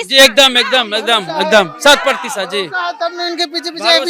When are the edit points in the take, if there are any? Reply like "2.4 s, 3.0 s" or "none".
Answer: none